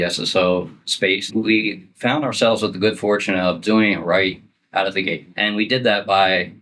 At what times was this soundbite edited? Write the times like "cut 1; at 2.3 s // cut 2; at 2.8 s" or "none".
cut 1; at 1.2 s // cut 2; at 5.3 s